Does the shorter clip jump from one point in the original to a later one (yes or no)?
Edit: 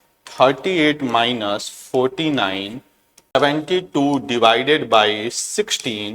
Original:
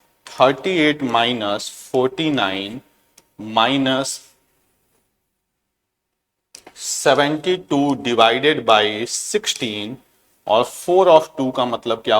yes